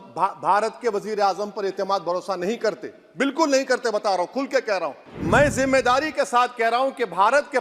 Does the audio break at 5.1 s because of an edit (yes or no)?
yes